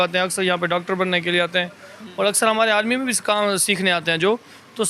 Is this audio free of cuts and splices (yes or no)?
yes